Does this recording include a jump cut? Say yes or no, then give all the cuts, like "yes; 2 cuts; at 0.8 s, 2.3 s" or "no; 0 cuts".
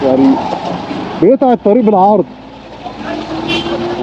no; 0 cuts